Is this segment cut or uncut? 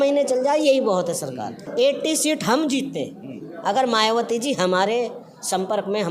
cut